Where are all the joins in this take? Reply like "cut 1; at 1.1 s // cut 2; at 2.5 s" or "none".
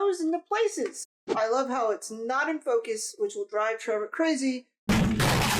cut 1; at 1.0 s

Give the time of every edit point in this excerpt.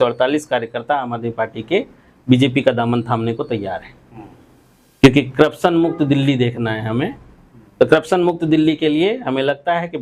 none

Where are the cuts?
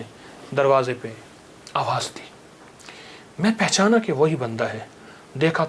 none

